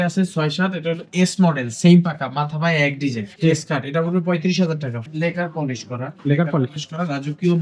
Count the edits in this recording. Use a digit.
2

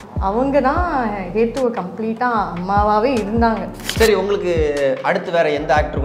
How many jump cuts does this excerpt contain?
1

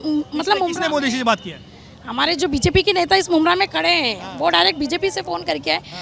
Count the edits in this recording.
0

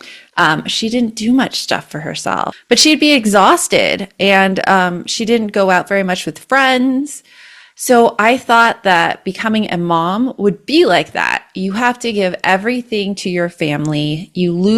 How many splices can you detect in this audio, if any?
1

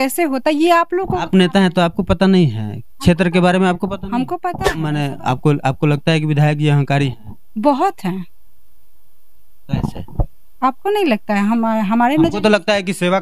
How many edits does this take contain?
1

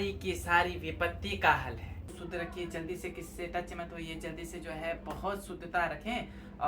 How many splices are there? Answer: 1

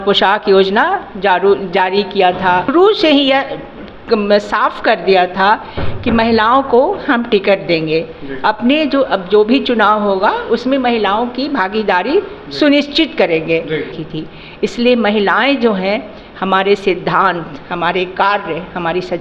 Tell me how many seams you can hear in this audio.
2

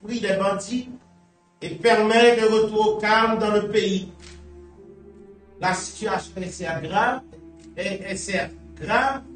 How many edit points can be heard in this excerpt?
0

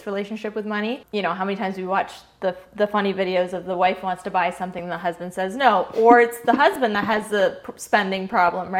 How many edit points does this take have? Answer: 1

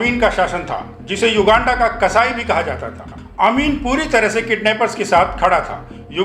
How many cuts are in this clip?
0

